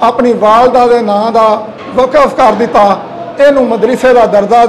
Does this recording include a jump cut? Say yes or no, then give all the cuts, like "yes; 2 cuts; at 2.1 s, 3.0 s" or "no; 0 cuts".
no; 0 cuts